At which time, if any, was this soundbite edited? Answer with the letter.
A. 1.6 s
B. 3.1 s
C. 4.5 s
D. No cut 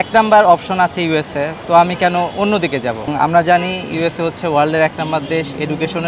B